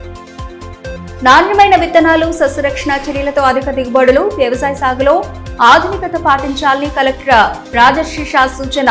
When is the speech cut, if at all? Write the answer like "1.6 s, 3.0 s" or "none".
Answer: none